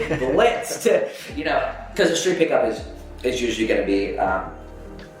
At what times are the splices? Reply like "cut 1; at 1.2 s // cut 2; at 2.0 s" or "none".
none